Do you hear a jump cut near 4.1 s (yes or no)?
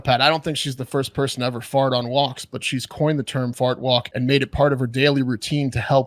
yes